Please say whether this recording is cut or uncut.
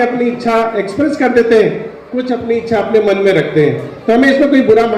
uncut